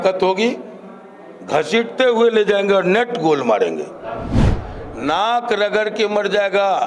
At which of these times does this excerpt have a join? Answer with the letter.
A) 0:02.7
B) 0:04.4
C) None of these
B